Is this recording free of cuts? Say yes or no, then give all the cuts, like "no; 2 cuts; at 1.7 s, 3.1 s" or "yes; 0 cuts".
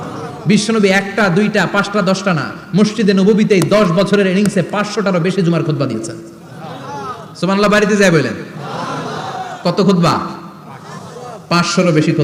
yes; 0 cuts